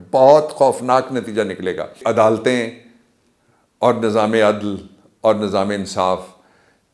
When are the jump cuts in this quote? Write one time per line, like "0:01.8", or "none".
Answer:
0:02.0